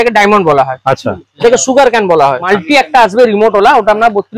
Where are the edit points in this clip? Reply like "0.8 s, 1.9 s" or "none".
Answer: 2.5 s